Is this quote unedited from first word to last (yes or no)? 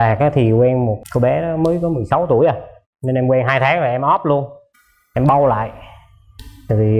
no